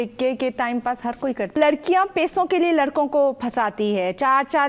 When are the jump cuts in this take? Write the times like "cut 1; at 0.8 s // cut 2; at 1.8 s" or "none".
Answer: cut 1; at 1.6 s